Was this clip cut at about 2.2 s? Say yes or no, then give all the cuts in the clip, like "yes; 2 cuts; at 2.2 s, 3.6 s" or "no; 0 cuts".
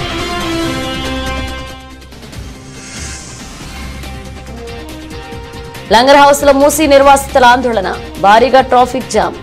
no; 0 cuts